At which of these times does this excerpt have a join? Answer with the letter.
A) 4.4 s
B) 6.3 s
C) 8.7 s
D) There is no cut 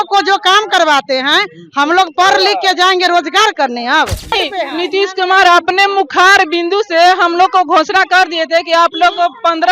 A